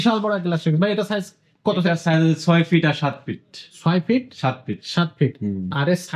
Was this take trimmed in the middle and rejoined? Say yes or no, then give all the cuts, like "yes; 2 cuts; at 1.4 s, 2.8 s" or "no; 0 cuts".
no; 0 cuts